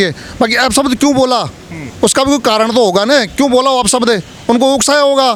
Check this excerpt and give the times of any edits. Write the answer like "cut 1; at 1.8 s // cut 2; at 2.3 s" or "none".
none